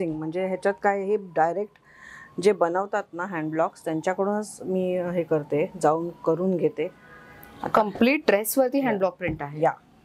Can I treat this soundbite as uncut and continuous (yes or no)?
yes